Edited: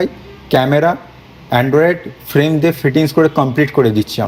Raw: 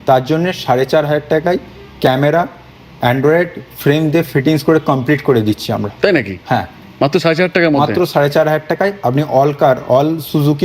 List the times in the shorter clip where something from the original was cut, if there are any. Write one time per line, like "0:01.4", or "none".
none